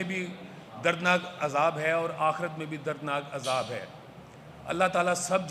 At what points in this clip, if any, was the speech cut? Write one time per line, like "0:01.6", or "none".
none